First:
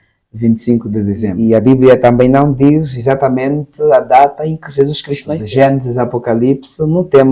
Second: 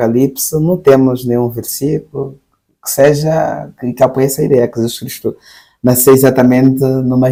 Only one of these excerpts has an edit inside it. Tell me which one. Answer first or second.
first